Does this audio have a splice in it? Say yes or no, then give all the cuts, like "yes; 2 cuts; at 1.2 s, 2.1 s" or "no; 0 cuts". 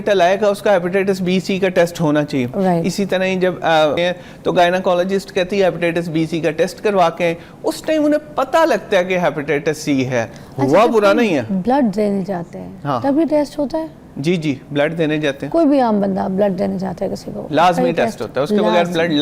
yes; 1 cut; at 4.0 s